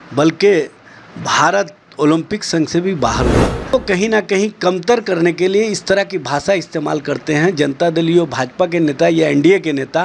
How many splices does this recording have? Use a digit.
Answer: 1